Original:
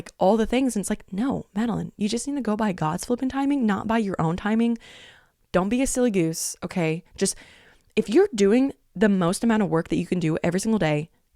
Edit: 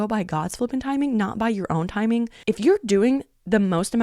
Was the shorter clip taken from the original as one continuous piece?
no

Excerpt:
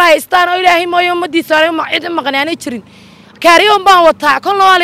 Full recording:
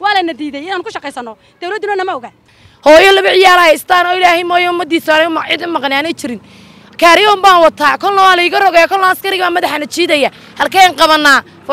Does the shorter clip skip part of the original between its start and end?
no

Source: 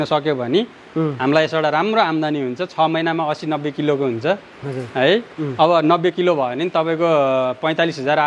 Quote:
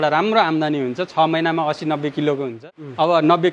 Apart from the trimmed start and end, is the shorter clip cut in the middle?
yes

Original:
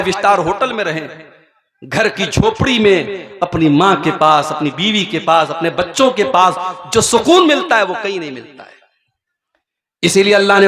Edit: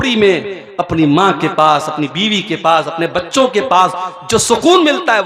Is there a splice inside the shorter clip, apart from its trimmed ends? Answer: no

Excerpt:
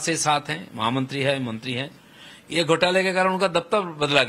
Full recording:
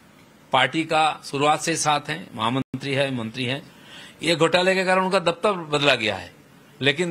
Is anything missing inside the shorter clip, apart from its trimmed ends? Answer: yes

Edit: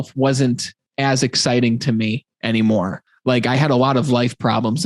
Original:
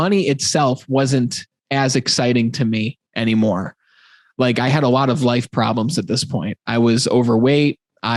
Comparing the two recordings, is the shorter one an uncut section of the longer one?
no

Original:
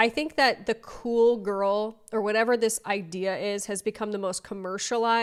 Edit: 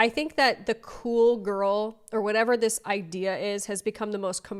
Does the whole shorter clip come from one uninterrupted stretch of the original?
yes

